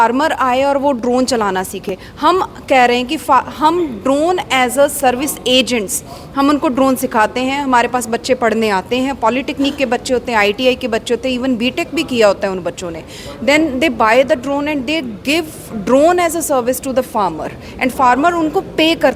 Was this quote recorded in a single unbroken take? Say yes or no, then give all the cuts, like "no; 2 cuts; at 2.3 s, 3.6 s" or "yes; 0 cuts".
yes; 0 cuts